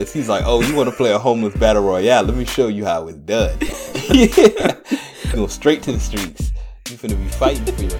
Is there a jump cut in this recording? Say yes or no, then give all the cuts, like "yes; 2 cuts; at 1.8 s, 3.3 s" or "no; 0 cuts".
no; 0 cuts